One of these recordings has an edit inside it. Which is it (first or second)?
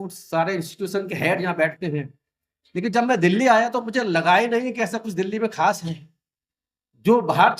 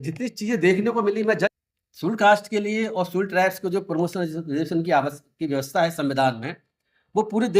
second